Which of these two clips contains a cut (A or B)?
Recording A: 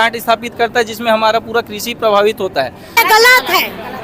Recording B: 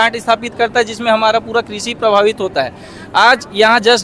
A